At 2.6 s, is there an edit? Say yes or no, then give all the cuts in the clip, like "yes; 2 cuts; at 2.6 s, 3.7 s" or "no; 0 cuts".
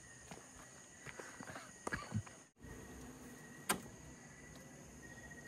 yes; 1 cut; at 2.6 s